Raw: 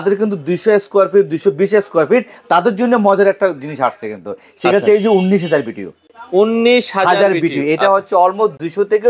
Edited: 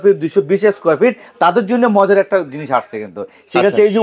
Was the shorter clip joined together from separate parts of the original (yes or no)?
no